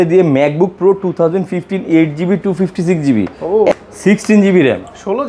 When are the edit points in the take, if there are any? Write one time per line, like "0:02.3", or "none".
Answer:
0:03.7